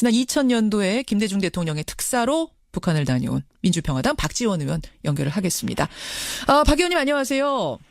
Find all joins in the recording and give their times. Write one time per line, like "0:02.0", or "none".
0:03.5

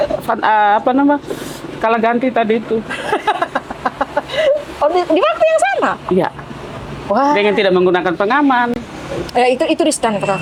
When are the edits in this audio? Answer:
none

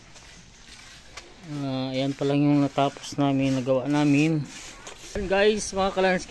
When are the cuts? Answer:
0:05.2

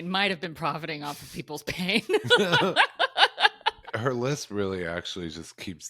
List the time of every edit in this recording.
0:03.9

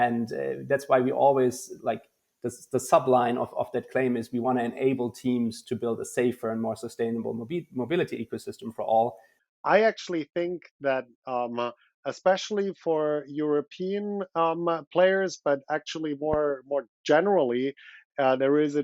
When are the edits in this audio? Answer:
0:09.4

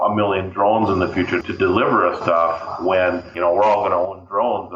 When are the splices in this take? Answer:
0:01.4
0:03.3

